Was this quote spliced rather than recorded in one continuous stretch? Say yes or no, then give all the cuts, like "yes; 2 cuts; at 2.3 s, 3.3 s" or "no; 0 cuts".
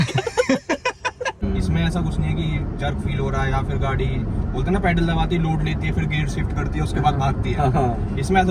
yes; 1 cut; at 1.4 s